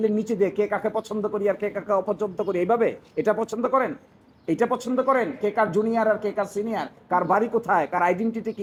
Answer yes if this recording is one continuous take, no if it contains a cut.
yes